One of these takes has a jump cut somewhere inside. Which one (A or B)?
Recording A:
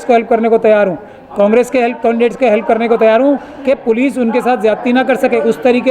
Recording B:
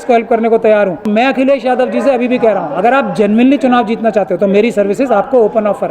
B